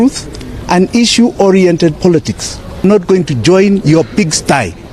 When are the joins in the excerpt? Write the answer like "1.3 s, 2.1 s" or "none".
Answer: 2.8 s